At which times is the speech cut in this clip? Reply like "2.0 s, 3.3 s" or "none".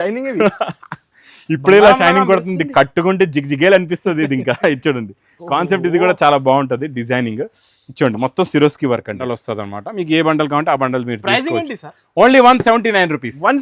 9.2 s